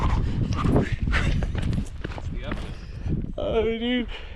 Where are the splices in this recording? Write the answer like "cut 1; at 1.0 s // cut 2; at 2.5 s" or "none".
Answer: cut 1; at 2.9 s